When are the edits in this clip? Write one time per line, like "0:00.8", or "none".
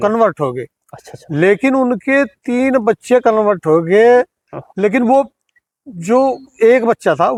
none